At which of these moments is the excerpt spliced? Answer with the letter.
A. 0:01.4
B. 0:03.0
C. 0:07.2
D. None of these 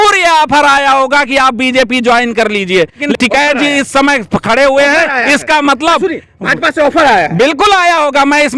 B